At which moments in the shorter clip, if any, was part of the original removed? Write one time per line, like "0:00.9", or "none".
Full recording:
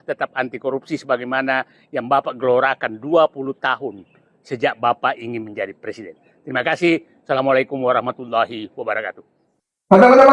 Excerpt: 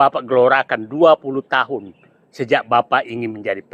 none